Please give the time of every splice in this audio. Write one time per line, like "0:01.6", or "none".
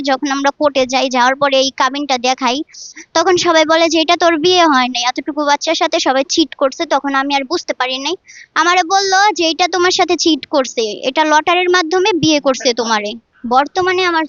none